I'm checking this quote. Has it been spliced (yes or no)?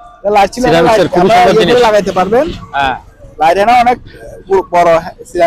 no